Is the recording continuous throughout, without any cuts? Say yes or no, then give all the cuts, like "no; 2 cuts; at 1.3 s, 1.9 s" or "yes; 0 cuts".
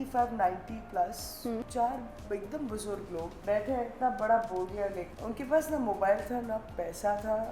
no; 3 cuts; at 1.7 s, 3.4 s, 5.0 s